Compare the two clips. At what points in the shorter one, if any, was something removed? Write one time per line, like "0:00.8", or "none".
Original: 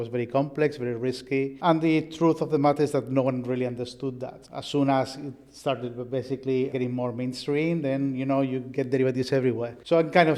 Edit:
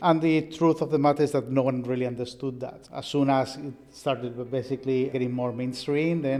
none